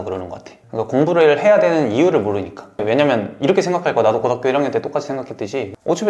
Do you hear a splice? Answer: yes; 1 cut; at 2.8 s

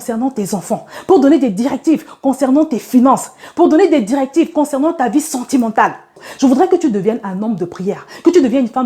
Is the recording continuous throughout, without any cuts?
no; 1 cut; at 6.2 s

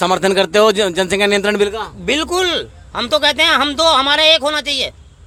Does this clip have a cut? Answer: no; 0 cuts

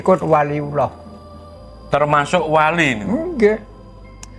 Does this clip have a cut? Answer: no; 0 cuts

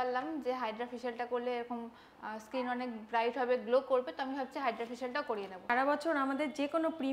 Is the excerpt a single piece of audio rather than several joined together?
no; 1 cut; at 5.7 s

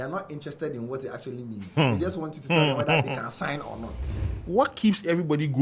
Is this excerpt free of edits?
no; 1 cut; at 4.2 s

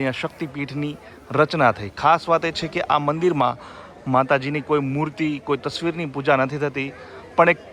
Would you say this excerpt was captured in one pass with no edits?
yes; 0 cuts

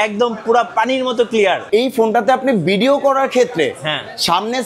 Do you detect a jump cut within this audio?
yes; 1 cut; at 1.6 s

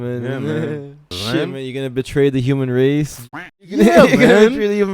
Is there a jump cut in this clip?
yes; 1 cut; at 1.1 s

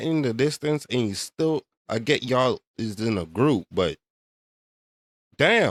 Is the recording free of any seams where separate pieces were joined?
yes; 0 cuts

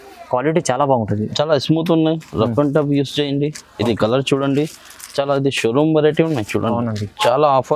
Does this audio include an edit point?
no; 0 cuts

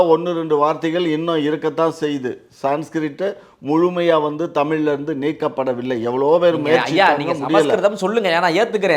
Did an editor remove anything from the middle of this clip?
no; 0 cuts

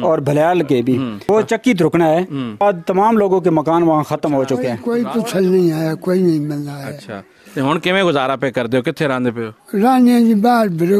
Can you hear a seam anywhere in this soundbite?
yes; 3 cuts; at 1.2 s, 2.6 s, 4.8 s

